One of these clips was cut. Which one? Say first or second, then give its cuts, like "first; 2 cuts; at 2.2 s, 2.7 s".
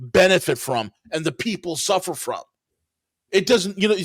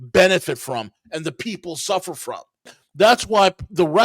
second; 1 cut; at 2.8 s